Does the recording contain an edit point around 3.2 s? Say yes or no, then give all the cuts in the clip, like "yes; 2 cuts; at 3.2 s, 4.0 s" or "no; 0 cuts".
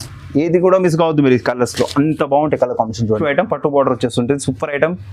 yes; 1 cut; at 3.2 s